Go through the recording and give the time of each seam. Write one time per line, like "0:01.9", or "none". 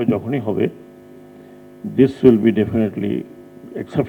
none